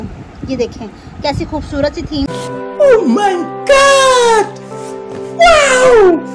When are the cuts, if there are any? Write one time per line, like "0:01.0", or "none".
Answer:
none